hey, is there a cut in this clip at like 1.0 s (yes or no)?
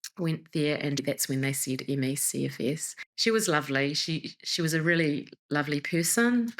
yes